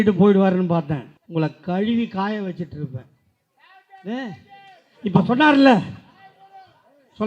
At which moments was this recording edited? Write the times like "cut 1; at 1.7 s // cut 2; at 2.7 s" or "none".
cut 1; at 1.1 s